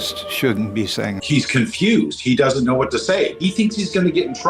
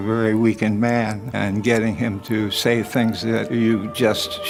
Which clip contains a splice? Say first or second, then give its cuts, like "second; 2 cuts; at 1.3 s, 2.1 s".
first; 2 cuts; at 1.3 s, 3.4 s